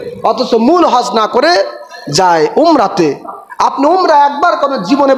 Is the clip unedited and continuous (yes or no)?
yes